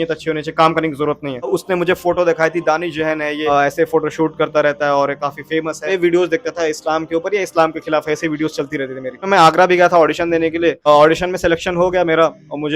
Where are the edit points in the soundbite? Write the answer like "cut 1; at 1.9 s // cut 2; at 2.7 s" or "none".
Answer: cut 1; at 1.4 s // cut 2; at 3.5 s // cut 3; at 5.9 s // cut 4; at 9.2 s